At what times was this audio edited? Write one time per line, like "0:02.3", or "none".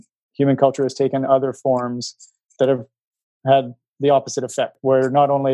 0:02.8
0:04.8